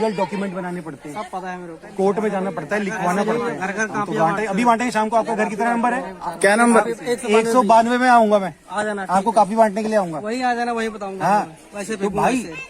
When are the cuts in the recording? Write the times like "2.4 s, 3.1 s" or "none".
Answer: 4.1 s